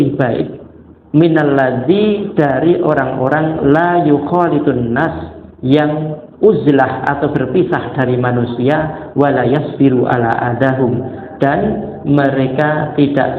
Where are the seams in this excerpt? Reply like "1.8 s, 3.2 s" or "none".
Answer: none

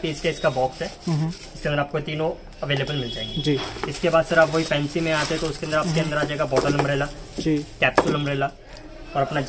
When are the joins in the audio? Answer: none

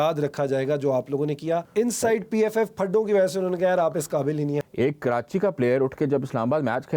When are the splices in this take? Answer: 1.7 s, 4.6 s

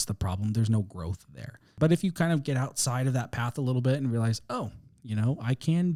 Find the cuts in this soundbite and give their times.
none

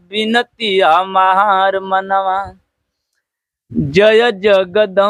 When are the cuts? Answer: none

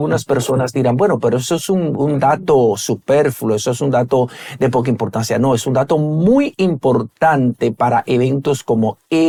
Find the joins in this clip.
none

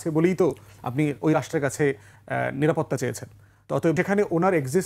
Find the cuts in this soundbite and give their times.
3.9 s

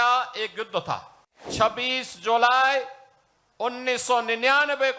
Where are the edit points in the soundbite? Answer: 1.4 s

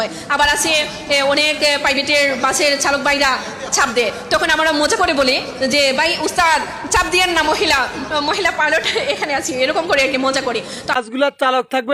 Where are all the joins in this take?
10.9 s

